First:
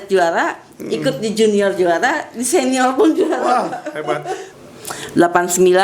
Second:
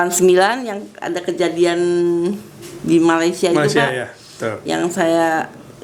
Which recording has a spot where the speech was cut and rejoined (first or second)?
first